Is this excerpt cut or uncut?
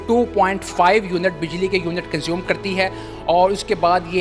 uncut